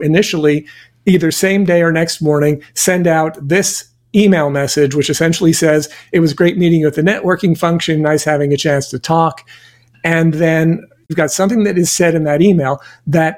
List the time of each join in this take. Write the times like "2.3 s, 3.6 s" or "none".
11.1 s